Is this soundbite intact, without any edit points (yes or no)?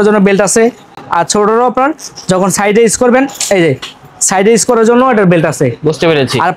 yes